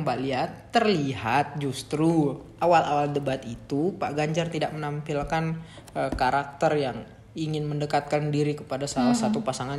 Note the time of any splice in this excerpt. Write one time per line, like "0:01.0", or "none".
none